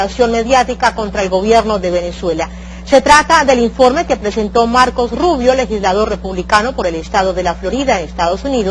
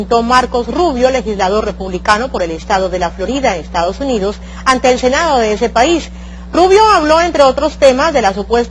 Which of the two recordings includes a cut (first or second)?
second